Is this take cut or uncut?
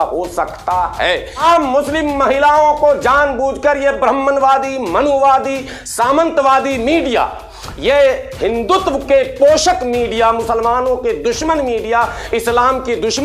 cut